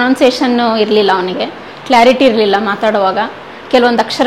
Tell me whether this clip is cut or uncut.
uncut